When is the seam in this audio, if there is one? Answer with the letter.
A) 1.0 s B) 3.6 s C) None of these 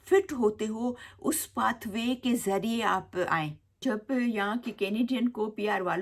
B